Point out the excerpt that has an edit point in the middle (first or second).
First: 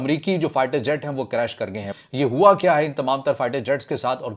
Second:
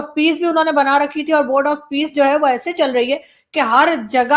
first